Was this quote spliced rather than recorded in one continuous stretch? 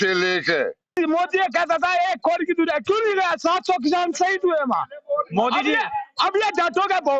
yes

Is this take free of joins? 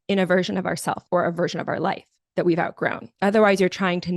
no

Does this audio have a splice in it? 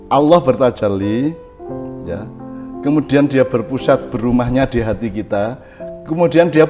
no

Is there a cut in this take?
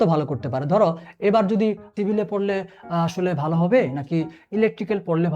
yes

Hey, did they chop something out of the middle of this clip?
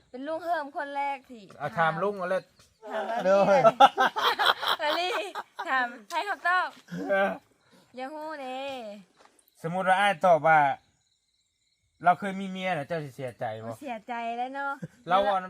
yes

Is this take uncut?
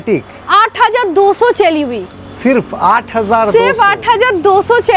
yes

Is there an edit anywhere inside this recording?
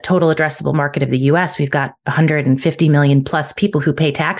no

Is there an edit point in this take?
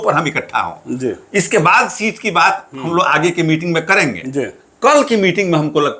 no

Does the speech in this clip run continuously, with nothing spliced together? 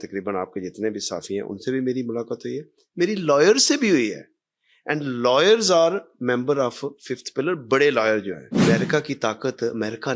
no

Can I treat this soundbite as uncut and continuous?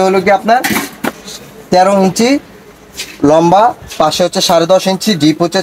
yes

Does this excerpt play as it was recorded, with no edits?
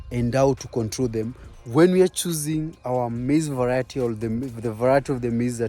no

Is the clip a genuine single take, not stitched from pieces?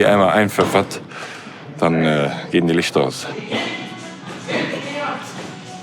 yes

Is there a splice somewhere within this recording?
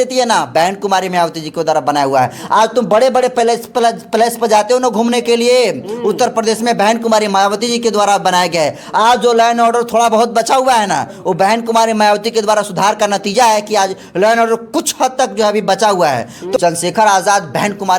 yes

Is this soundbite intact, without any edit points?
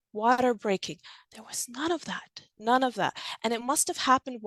yes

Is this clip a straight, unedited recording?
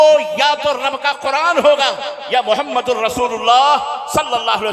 yes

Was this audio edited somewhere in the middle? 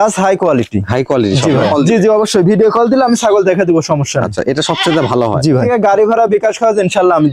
yes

